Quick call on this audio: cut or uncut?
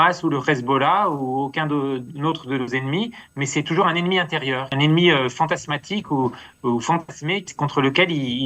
cut